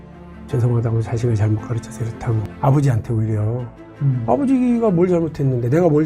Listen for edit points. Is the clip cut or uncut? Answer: cut